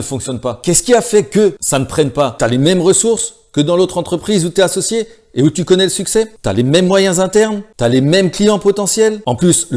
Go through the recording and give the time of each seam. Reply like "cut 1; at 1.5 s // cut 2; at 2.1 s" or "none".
none